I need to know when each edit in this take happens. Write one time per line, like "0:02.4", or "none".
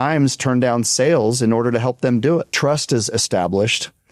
0:02.5